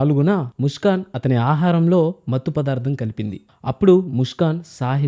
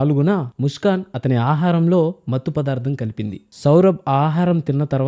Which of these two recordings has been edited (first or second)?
first